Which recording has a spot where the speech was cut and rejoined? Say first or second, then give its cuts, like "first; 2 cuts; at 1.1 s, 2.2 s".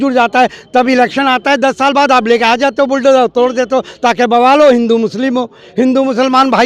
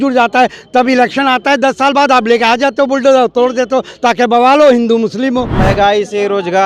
second; 1 cut; at 5.5 s